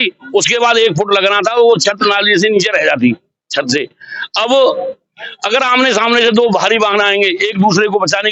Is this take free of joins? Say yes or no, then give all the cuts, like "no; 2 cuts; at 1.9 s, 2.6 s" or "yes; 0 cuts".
yes; 0 cuts